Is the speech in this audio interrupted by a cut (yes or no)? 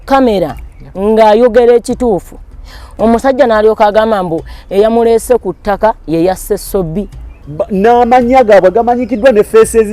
yes